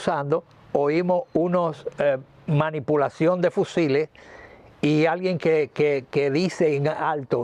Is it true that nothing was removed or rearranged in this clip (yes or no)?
yes